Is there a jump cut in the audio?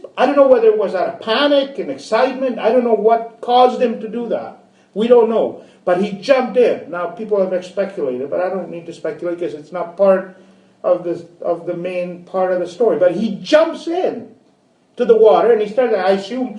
yes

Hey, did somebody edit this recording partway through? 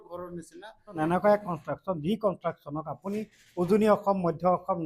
yes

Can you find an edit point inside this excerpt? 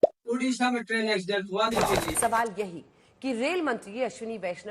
yes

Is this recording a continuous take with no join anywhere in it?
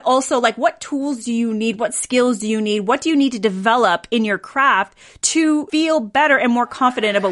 no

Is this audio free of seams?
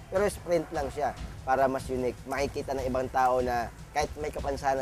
no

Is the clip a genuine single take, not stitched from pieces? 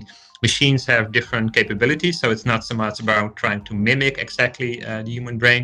yes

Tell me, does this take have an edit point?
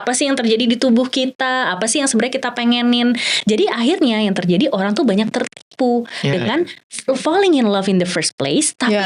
no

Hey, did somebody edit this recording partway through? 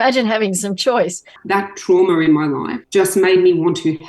yes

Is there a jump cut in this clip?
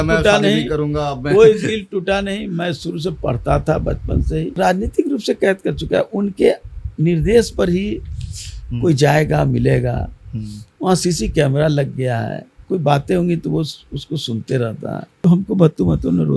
yes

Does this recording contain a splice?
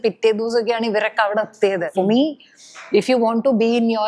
yes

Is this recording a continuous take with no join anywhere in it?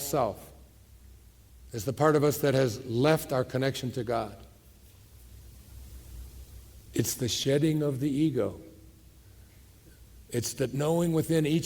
no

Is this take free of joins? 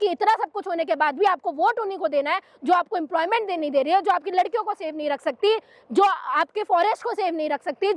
yes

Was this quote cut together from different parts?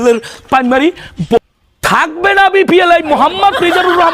yes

